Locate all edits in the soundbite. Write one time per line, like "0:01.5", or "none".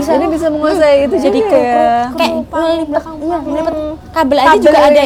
none